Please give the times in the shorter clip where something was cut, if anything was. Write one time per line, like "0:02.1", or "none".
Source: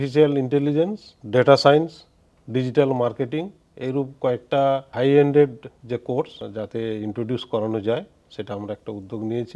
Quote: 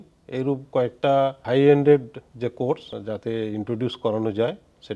none